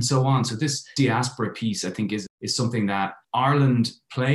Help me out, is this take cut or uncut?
cut